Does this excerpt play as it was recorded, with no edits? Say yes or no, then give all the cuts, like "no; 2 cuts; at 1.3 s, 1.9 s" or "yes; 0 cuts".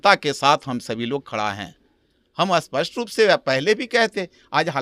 yes; 0 cuts